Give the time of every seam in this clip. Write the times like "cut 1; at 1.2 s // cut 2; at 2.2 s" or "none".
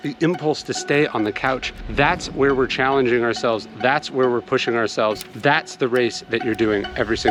none